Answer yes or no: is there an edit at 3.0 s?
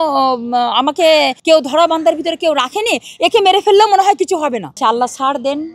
no